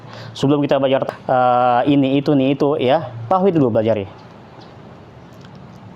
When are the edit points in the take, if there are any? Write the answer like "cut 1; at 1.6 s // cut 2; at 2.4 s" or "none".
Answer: cut 1; at 1.0 s